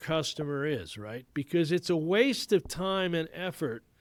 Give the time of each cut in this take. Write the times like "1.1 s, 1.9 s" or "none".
none